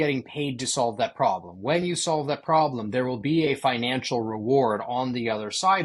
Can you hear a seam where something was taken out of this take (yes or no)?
no